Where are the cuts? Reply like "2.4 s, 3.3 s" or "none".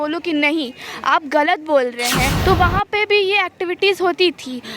2.3 s